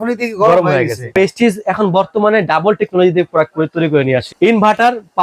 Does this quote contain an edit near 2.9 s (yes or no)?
no